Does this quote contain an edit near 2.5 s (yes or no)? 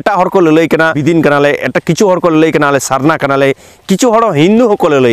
no